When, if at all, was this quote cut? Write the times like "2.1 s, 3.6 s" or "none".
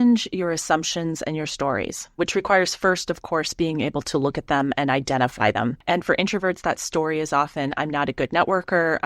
2.2 s, 5.8 s